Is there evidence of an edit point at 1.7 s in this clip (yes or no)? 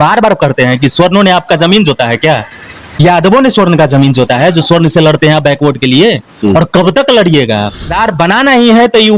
no